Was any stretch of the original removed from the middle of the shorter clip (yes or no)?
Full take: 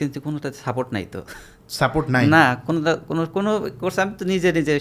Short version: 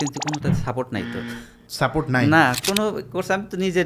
yes